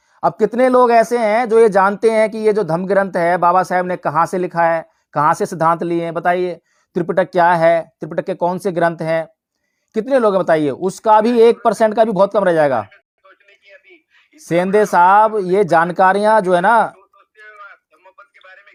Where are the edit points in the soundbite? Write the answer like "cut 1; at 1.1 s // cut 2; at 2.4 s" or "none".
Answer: none